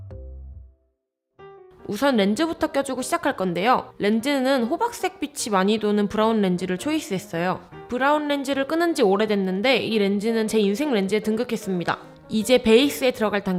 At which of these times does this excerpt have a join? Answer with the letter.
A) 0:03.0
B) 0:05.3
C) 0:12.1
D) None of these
D